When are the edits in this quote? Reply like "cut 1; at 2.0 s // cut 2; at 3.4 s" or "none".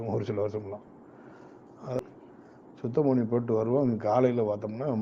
cut 1; at 2.0 s